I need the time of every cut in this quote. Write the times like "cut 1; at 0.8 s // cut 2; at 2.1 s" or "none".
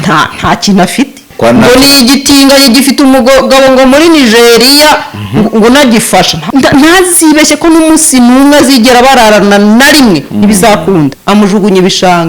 cut 1; at 1.2 s // cut 2; at 6.4 s // cut 3; at 11.2 s